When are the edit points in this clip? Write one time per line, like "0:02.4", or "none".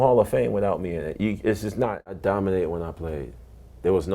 0:02.1